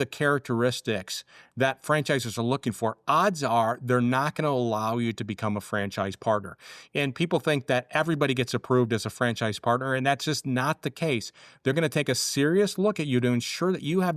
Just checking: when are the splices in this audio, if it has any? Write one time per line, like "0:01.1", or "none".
none